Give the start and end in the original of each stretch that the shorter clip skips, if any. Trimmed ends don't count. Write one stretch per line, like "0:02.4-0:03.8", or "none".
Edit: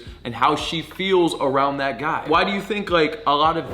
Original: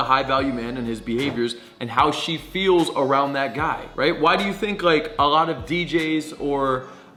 0:03.8-0:04.2